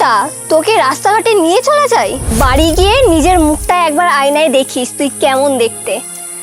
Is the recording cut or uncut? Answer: uncut